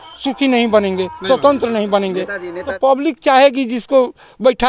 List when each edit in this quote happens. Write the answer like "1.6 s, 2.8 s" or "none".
none